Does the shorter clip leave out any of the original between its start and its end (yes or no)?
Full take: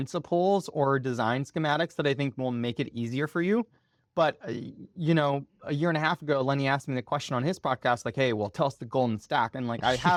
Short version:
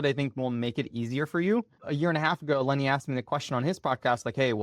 yes